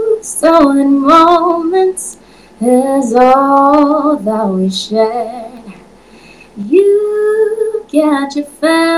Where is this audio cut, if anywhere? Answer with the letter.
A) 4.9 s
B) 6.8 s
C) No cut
C